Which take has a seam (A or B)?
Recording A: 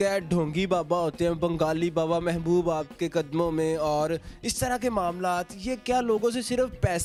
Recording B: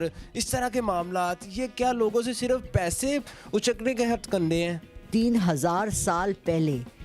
B